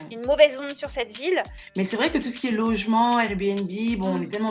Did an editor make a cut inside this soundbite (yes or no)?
yes